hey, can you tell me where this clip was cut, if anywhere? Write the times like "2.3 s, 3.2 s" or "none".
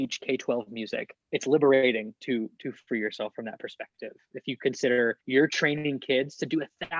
1.2 s, 5.2 s